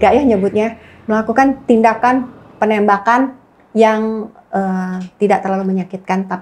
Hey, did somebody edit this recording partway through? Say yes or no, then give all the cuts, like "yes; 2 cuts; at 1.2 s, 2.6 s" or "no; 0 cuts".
no; 0 cuts